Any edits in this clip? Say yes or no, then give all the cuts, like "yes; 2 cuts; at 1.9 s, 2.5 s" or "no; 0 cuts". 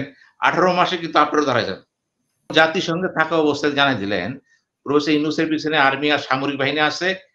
yes; 1 cut; at 2.5 s